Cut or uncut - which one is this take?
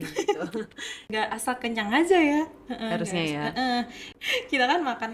cut